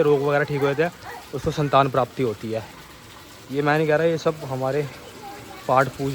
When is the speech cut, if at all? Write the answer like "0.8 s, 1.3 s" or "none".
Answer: none